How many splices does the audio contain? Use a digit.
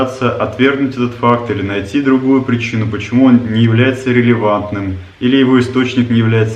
0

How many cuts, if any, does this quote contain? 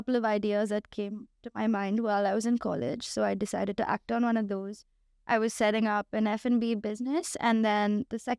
0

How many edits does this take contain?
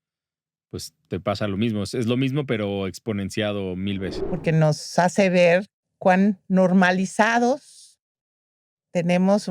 1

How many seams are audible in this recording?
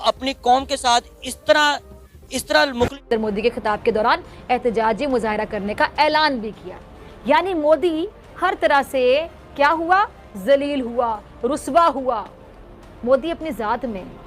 1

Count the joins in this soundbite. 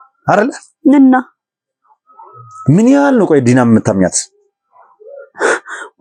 0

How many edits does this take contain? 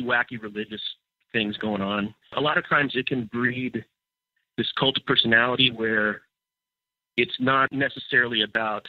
2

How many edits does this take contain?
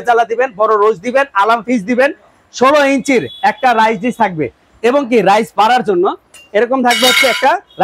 0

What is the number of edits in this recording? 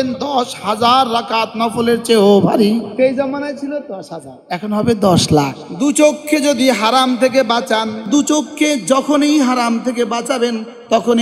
3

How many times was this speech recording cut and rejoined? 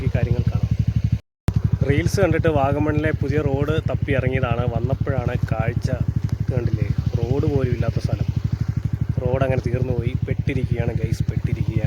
1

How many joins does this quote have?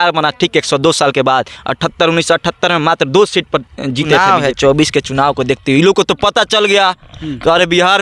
1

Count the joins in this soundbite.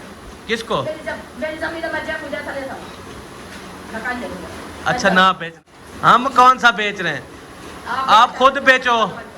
1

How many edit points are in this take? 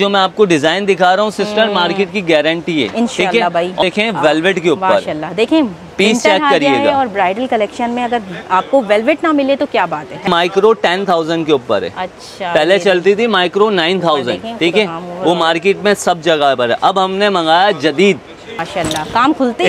3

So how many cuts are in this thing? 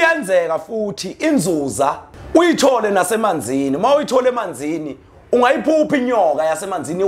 1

